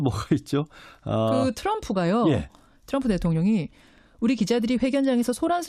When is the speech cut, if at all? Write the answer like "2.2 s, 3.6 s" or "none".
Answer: 1.8 s